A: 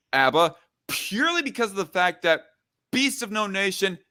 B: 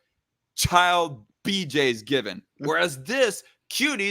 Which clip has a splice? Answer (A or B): B